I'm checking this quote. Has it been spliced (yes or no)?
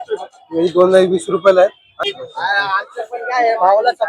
yes